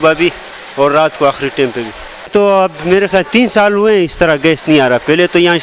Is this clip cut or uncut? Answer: cut